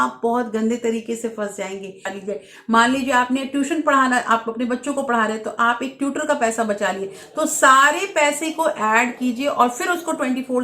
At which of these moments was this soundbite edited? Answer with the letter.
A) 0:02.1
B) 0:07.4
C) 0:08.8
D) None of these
A